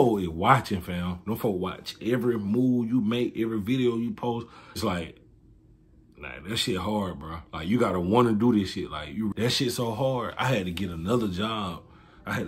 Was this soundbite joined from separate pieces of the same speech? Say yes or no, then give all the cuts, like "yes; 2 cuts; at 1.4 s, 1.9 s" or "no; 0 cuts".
yes; 2 cuts; at 4.8 s, 9.3 s